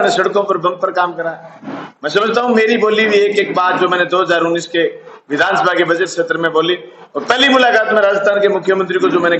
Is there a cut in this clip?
no; 0 cuts

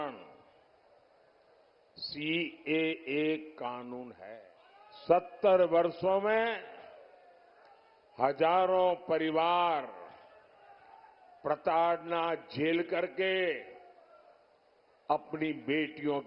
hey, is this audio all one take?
no; 1 cut; at 4.3 s

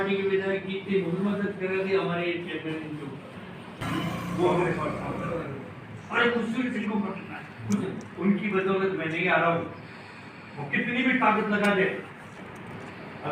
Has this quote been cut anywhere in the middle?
yes; 1 cut; at 3.8 s

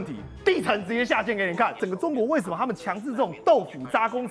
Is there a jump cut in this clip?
yes; 1 cut; at 1.8 s

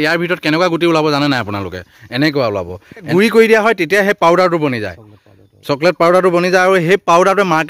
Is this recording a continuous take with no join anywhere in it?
no; 1 cut; at 3.1 s

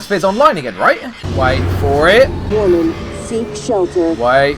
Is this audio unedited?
no; 2 cuts; at 1.2 s, 2.4 s

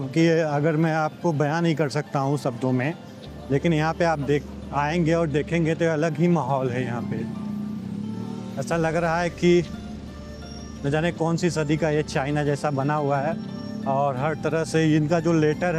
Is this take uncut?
yes; 0 cuts

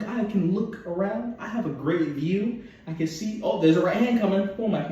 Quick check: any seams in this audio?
no; 0 cuts

